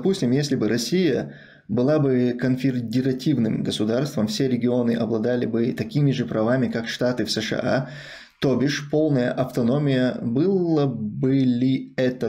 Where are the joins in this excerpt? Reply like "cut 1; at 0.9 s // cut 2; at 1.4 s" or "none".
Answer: none